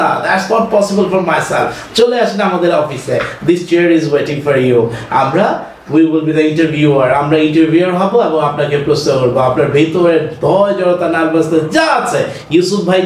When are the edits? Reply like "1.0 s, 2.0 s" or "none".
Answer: none